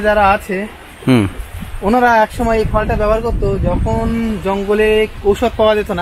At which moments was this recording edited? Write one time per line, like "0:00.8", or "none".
none